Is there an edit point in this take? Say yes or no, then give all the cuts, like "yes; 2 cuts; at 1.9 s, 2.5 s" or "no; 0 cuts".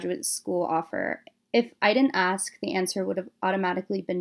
no; 0 cuts